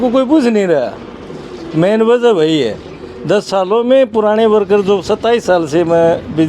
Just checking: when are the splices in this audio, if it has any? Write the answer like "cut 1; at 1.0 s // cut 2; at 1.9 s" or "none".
none